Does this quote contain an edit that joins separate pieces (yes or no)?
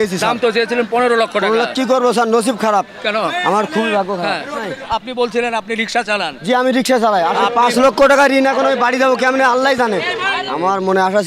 yes